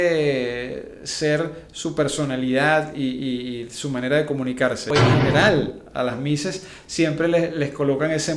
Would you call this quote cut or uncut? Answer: cut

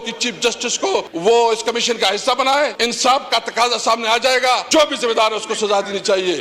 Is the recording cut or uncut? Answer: cut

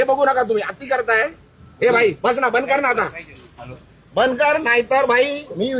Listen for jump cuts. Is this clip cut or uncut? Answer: uncut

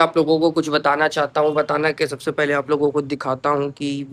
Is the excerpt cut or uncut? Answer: uncut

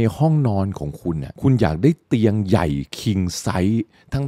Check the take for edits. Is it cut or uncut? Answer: cut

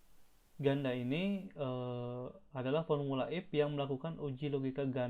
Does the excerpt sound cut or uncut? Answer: uncut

